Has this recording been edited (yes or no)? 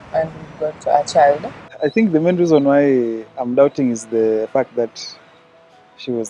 yes